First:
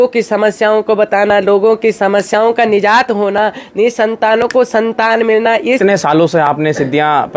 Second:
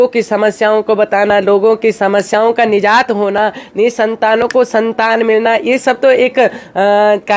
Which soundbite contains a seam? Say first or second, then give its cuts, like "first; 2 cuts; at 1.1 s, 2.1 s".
first; 1 cut; at 5.8 s